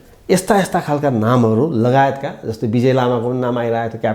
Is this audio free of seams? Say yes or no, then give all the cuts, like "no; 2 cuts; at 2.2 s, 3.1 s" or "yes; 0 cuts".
yes; 0 cuts